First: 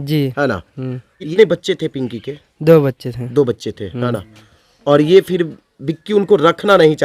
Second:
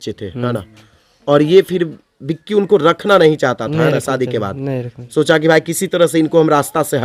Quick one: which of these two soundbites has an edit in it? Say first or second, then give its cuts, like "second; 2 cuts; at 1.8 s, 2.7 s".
first; 1 cut; at 1.3 s